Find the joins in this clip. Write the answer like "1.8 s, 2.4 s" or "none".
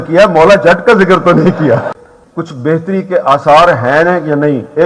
1.9 s

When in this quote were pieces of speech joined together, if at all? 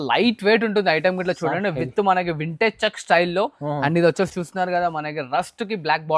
none

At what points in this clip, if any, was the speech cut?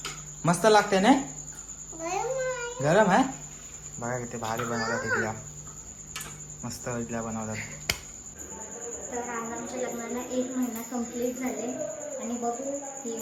none

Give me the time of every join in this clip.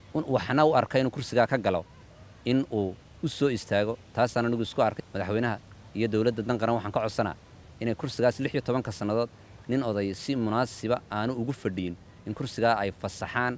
5.0 s

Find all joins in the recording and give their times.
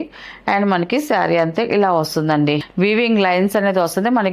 2.7 s

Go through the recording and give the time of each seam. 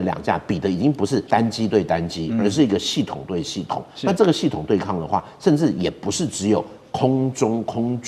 1.2 s

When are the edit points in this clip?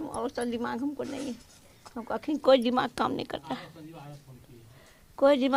none

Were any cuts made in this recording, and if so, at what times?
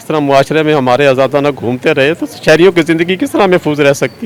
none

